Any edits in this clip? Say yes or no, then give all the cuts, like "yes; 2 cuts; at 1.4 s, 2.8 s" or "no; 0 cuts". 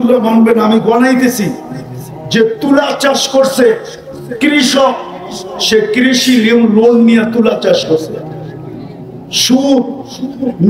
no; 0 cuts